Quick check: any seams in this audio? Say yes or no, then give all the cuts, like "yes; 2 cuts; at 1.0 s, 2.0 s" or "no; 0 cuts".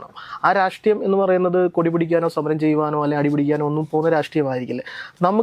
no; 0 cuts